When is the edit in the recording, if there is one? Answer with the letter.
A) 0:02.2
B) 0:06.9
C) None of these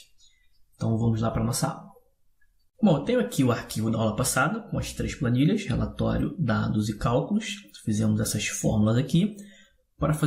B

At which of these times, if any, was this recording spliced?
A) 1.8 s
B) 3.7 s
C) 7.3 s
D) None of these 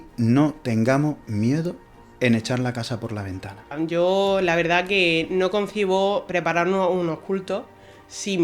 B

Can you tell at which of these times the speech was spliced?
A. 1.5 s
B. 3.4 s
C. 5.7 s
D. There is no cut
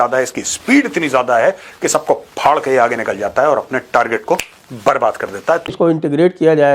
C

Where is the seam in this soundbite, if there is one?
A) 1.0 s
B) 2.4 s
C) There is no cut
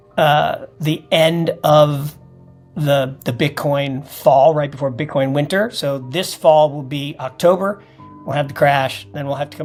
C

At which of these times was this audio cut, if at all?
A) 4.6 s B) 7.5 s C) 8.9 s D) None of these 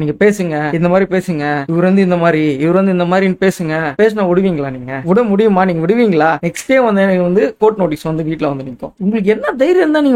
C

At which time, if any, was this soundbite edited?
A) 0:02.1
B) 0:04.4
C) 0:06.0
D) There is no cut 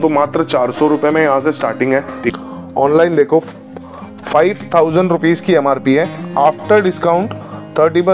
A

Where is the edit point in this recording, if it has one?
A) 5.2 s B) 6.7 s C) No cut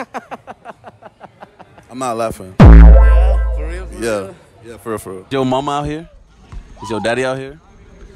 A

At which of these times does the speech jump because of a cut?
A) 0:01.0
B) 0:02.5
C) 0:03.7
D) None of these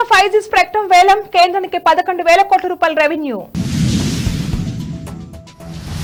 D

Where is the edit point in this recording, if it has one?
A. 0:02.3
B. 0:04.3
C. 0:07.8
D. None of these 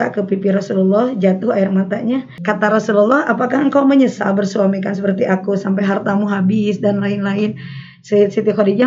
A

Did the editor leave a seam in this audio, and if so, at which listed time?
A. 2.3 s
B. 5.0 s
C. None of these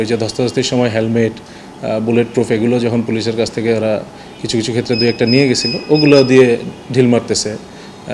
C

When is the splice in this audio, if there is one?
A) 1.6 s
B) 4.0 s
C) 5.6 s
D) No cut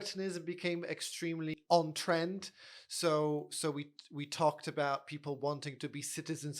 A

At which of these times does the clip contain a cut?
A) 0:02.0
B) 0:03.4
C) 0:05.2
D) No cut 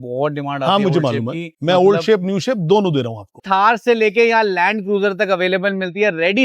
B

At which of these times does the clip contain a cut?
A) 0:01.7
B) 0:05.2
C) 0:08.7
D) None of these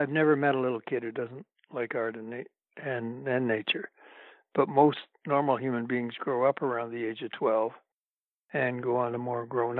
D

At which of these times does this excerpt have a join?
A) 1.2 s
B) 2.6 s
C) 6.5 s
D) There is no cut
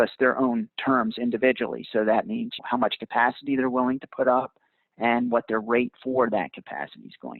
B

